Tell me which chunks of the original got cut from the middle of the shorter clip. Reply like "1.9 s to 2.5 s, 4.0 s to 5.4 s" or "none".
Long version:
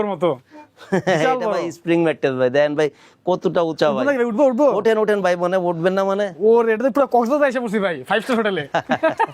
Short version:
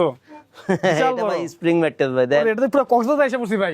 2.7 s to 6.7 s